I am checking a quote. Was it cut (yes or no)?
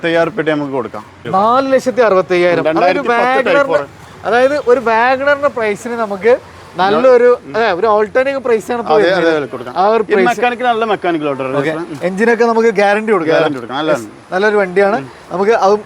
no